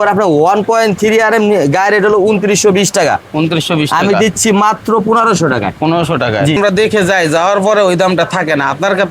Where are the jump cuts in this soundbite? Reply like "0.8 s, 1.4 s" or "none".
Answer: 6.6 s